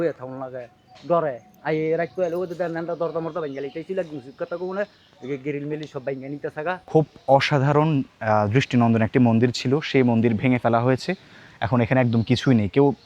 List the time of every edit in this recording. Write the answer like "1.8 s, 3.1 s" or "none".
1.5 s, 6.8 s